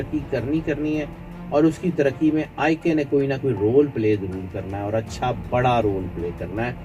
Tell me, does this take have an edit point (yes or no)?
no